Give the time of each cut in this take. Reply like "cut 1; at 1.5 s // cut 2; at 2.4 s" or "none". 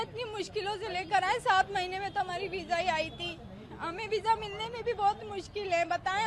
none